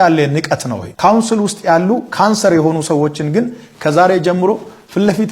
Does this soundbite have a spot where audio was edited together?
no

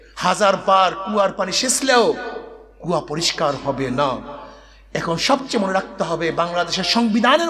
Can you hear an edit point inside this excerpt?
no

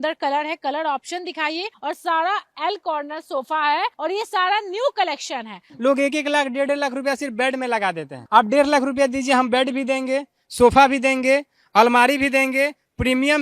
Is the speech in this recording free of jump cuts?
no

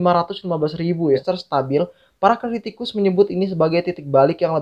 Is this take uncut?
no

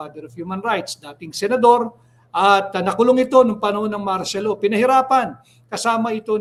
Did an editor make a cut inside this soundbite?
no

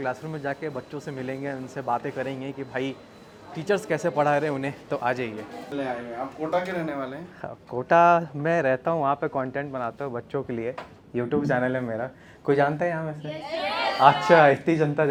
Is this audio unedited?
yes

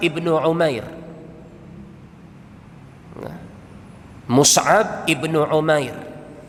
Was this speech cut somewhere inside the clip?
no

